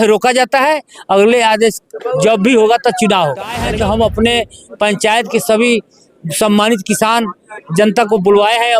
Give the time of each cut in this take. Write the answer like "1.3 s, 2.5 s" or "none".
3.6 s